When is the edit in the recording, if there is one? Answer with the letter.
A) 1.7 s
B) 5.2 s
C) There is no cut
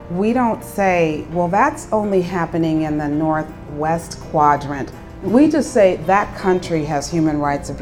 B